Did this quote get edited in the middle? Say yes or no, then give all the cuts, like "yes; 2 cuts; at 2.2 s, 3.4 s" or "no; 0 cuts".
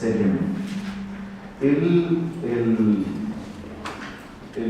yes; 1 cut; at 2.9 s